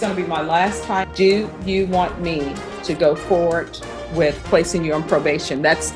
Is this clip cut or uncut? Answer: cut